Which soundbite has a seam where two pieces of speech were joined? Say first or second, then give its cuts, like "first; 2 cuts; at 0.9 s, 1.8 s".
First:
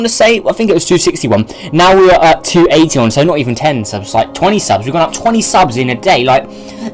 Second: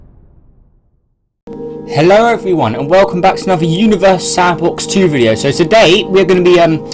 first; 1 cut; at 3.3 s